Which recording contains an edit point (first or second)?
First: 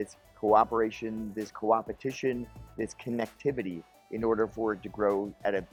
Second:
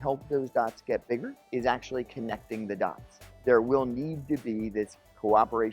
second